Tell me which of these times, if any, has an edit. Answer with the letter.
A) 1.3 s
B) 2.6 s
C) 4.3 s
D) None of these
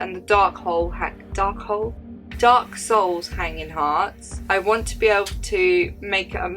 C